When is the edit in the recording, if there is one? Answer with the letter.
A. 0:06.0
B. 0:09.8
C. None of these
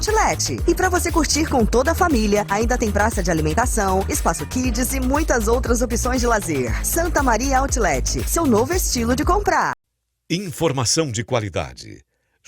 B